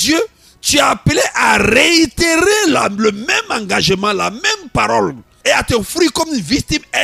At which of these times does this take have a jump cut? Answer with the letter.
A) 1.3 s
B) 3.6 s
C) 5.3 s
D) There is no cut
C